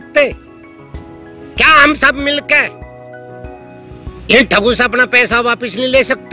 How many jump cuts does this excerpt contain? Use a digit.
0